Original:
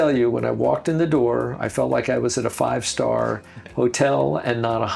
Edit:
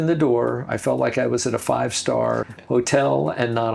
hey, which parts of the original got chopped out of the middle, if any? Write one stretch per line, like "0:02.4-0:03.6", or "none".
0:03.4-0:03.6